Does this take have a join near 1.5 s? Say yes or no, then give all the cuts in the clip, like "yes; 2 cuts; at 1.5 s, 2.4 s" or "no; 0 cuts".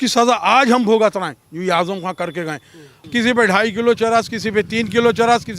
no; 1 cut; at 2.9 s